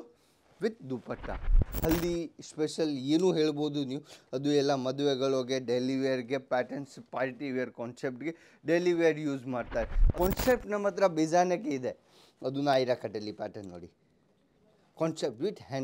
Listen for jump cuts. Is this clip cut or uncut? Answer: cut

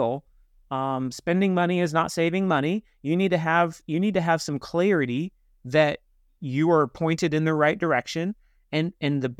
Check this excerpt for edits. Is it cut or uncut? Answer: uncut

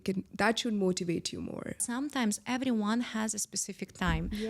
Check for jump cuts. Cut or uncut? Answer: cut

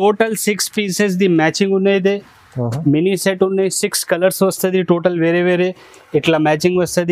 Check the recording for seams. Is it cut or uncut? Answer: uncut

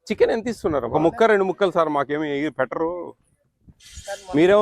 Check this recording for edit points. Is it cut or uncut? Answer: cut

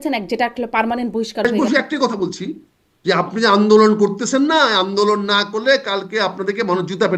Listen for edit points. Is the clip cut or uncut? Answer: cut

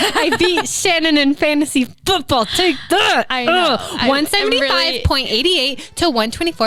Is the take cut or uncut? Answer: uncut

